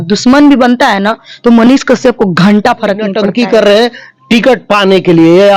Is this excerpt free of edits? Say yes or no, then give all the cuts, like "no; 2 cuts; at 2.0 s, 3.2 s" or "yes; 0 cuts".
no; 1 cut; at 3.2 s